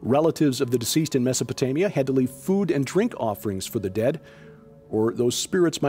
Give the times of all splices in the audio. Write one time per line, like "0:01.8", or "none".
0:04.6